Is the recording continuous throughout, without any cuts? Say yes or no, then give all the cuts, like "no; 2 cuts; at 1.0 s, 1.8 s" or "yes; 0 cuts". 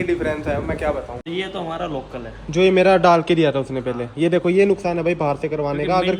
no; 1 cut; at 1.2 s